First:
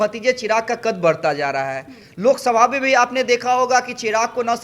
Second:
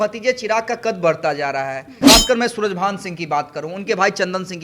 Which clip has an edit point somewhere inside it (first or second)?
second